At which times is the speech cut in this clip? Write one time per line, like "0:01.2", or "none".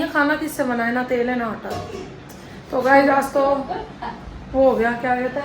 none